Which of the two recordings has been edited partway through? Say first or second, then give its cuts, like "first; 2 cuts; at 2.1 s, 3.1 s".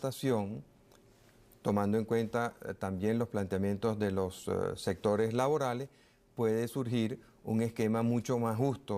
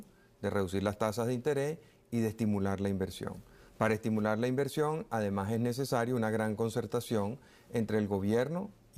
first; 1 cut; at 4.8 s